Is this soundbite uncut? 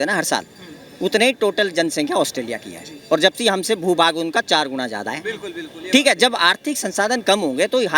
yes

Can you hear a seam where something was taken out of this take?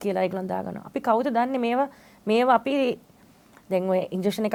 no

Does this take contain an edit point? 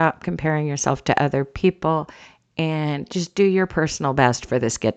no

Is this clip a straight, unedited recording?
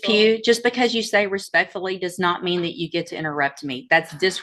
yes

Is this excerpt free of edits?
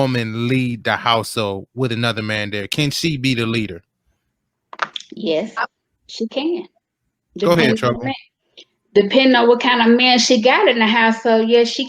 yes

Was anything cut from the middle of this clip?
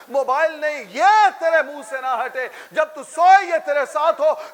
no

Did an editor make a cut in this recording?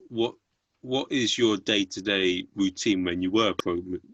no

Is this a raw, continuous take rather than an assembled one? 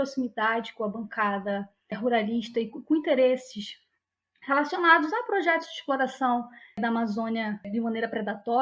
no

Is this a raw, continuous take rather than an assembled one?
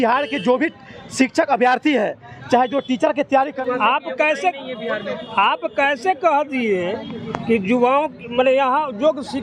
no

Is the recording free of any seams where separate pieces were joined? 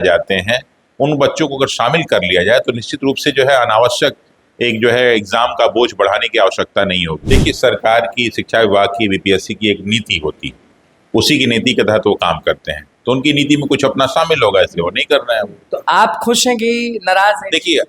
no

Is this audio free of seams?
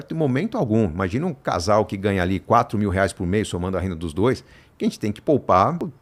yes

